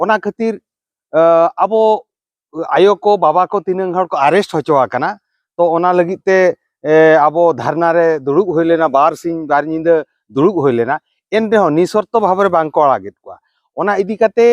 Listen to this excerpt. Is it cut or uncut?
uncut